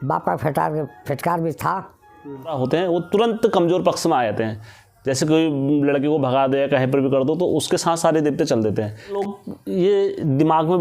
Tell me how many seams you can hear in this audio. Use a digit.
2